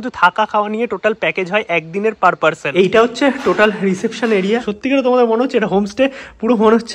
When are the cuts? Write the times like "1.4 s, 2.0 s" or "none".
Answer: 4.7 s